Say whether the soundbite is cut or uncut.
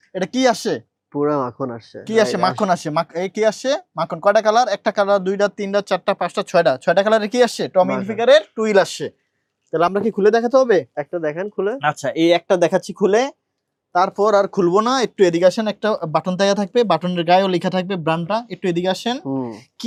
uncut